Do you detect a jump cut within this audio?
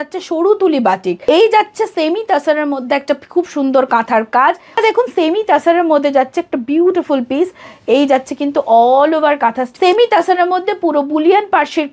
yes; 3 cuts; at 1.2 s, 4.8 s, 9.7 s

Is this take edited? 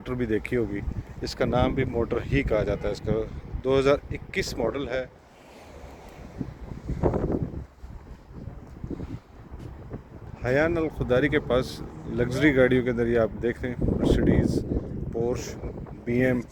yes; 2 cuts; at 5.2 s, 10.3 s

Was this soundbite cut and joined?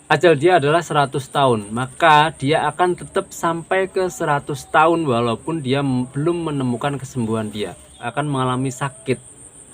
yes; 1 cut; at 8.0 s

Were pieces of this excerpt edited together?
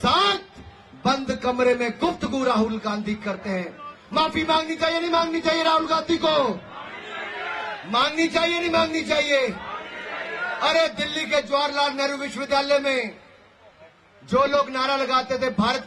no; 0 cuts

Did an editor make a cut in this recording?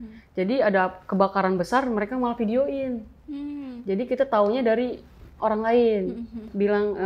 no; 0 cuts

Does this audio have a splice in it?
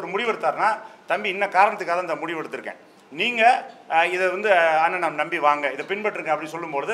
no; 0 cuts

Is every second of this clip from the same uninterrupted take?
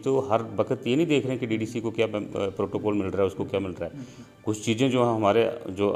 yes; 0 cuts

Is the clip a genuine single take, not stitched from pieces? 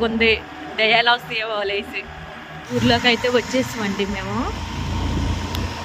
yes; 0 cuts

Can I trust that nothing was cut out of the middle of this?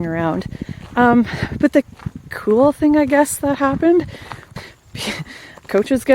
no; 1 cut; at 4.4 s

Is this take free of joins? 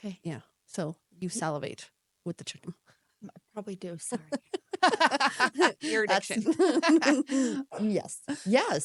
yes; 0 cuts

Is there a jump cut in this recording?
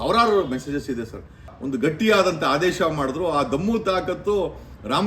yes; 1 cut; at 1.5 s

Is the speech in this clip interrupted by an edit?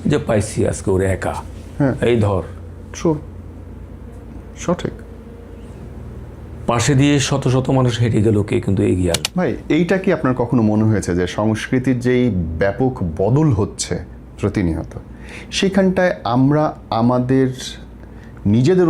yes; 1 cut; at 9.2 s

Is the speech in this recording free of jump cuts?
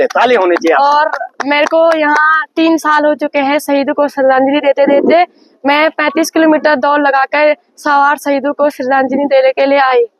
yes; 0 cuts

